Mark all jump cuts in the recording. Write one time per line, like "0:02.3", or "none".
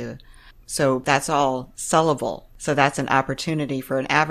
0:01.0
0:02.5